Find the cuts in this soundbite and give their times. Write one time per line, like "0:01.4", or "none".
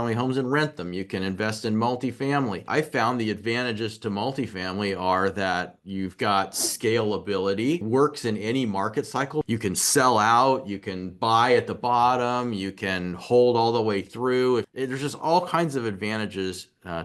0:02.6
0:07.8
0:09.5
0:14.7